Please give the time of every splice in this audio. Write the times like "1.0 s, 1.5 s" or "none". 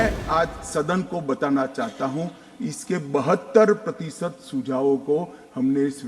none

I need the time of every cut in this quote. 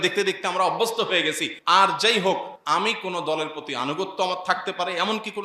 1.5 s, 2.5 s

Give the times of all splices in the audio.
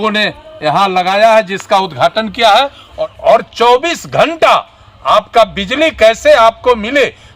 3.0 s

